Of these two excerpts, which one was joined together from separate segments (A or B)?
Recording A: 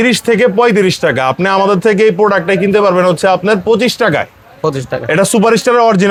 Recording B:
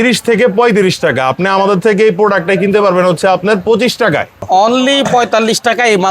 B